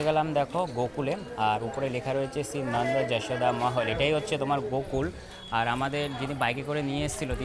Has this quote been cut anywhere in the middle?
no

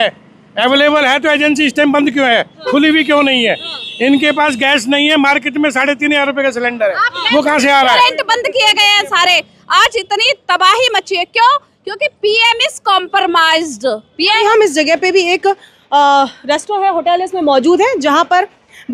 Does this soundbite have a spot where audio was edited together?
yes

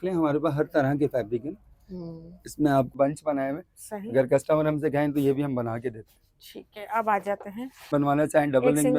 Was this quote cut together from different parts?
yes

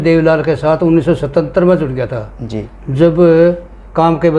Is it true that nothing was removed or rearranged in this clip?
yes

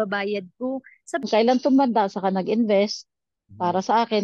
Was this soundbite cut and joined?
yes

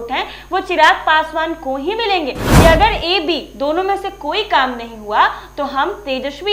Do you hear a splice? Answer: yes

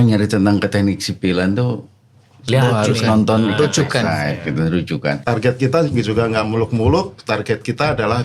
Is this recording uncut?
no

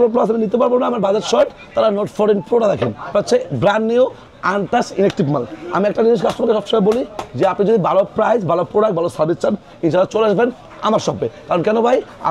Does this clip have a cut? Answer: yes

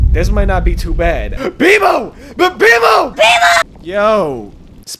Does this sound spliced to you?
yes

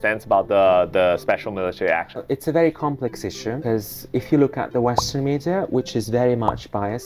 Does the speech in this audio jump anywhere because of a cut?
yes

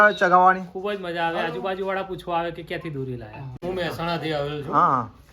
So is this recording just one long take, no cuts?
no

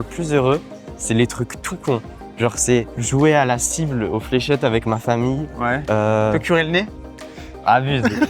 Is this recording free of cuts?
yes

